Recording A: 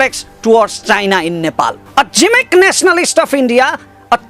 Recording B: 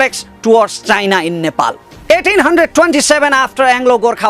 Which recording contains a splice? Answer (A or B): B